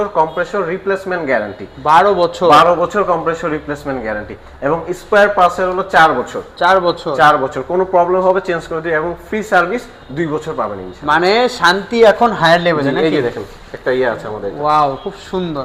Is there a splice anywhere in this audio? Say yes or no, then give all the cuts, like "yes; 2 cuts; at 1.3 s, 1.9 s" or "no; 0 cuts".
no; 0 cuts